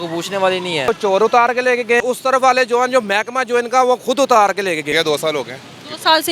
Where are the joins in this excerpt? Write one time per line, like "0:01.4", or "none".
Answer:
0:00.9
0:02.0
0:04.9